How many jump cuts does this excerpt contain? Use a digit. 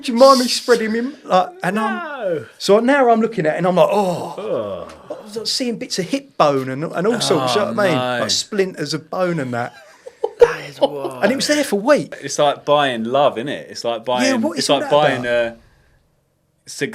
1